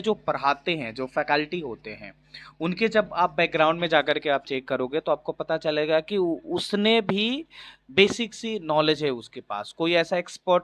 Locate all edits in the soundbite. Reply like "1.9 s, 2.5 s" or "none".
none